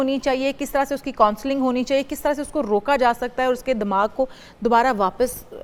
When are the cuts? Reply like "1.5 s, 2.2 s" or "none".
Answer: none

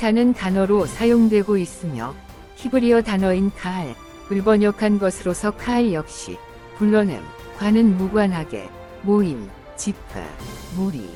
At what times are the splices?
none

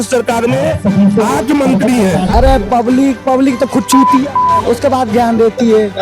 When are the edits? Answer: 2.3 s

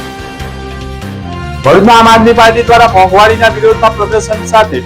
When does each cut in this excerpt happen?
1.2 s

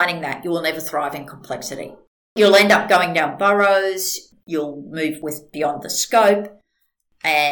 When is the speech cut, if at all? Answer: 2.2 s

